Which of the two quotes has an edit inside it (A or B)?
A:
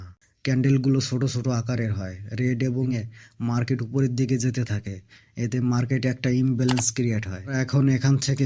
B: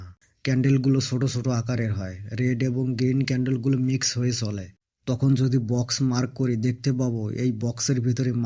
A